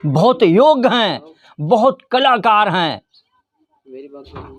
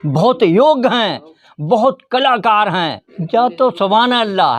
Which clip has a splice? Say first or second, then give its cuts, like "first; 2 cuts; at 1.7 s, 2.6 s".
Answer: second; 1 cut; at 3.1 s